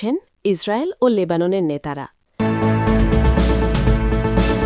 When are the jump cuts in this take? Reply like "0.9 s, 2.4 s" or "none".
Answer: 2.2 s